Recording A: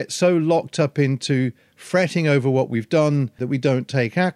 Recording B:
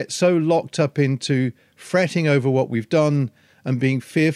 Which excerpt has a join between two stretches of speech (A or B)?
A